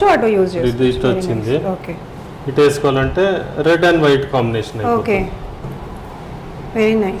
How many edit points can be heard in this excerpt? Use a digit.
0